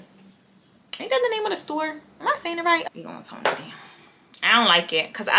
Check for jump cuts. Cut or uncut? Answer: cut